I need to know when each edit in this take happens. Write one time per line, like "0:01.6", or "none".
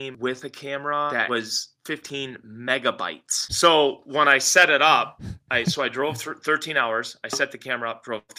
0:01.1
0:03.4